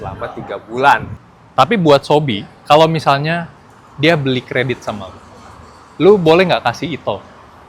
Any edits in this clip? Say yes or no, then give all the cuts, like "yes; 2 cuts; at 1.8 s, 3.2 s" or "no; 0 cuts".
yes; 1 cut; at 1.1 s